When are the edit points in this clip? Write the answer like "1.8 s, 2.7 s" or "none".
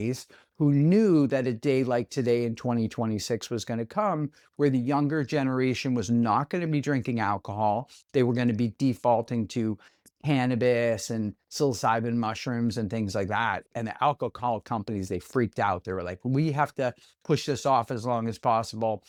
none